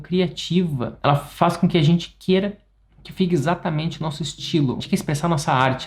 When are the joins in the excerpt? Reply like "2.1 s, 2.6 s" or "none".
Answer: 0.9 s, 4.8 s